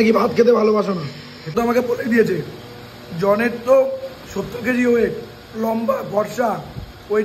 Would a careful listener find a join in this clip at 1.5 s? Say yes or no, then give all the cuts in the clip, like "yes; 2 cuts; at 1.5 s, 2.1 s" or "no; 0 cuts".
yes; 1 cut; at 1.5 s